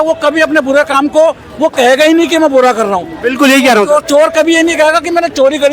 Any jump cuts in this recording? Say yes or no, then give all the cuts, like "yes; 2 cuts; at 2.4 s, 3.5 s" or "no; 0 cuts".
no; 0 cuts